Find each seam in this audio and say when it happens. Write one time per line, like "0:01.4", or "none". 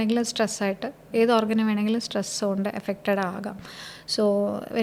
none